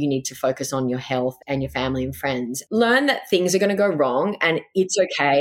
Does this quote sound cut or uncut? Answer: cut